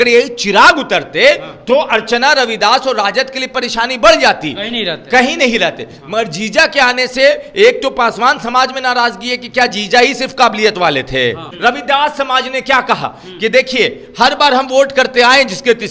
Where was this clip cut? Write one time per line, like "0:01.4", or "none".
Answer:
0:11.5

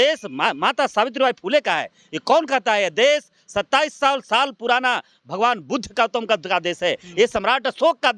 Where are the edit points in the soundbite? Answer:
none

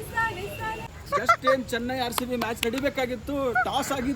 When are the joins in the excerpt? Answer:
0:00.9

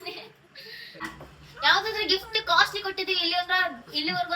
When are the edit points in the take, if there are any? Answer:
0:01.0

